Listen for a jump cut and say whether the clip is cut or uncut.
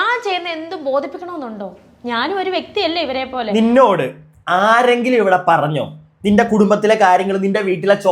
cut